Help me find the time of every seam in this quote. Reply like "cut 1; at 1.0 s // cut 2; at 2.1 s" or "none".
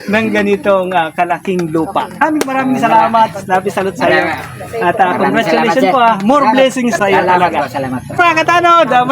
cut 1; at 2.2 s // cut 2; at 7.0 s // cut 3; at 8.2 s